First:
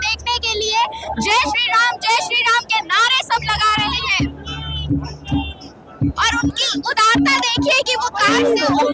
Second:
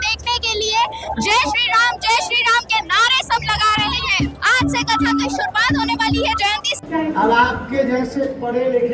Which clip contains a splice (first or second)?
second